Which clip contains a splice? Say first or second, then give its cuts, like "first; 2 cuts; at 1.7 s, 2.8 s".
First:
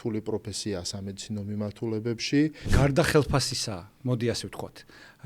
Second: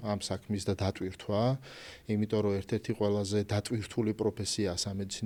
first; 1 cut; at 2.7 s